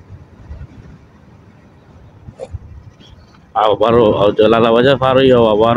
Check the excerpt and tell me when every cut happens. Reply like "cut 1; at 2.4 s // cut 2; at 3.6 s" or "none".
cut 1; at 2.6 s